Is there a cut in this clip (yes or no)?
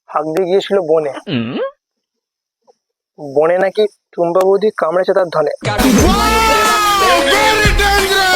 no